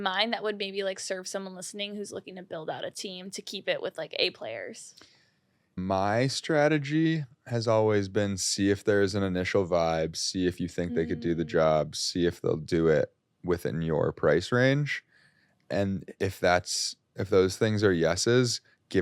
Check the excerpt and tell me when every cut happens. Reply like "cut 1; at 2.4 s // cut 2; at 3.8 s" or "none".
cut 1; at 5.8 s

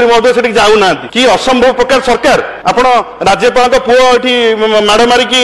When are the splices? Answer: cut 1; at 1.1 s // cut 2; at 2.5 s

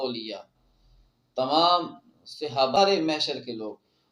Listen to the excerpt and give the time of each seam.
cut 1; at 2.8 s

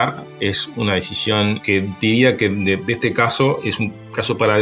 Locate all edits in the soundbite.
cut 1; at 1.6 s // cut 2; at 3.6 s

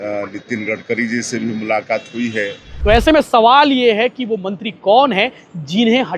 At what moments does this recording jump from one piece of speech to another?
cut 1; at 2.7 s

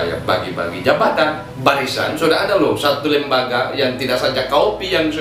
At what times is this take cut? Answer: cut 1; at 1.5 s

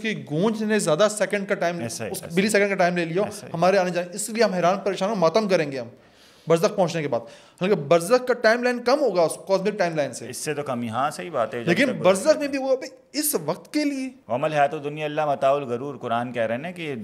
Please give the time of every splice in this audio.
cut 1; at 14.2 s

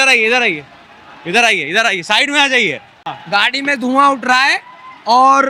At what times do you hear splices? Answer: cut 1; at 3.1 s

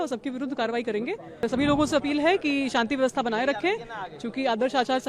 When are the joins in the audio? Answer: cut 1; at 1.4 s

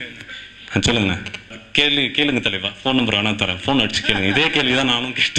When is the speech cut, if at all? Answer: cut 1; at 1.6 s

